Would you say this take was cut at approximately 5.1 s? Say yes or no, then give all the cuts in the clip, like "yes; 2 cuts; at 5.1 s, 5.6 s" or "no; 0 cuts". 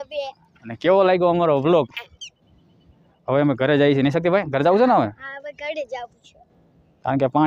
no; 1 cut; at 1.9 s